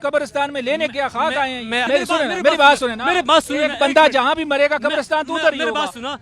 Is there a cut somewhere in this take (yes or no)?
yes